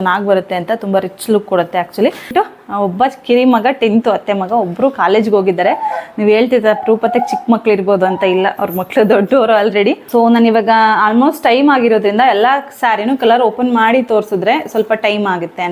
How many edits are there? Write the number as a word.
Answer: two